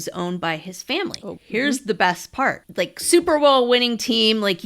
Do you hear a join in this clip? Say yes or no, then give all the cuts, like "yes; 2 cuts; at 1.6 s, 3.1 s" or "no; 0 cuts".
yes; 2 cuts; at 1.3 s, 2.6 s